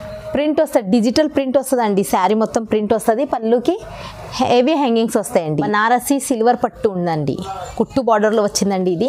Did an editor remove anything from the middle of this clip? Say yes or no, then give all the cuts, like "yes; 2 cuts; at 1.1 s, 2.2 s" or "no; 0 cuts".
yes; 1 cut; at 5.7 s